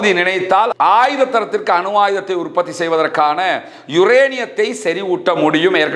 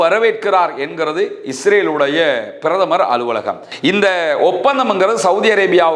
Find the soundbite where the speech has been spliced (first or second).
second